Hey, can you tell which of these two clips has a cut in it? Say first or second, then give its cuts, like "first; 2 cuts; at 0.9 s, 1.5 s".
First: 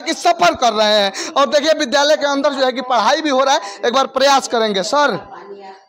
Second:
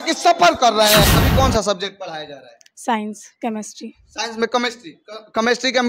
second; 1 cut; at 1.1 s